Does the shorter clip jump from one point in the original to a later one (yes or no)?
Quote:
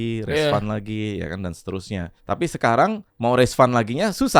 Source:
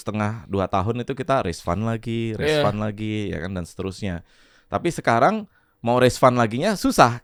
yes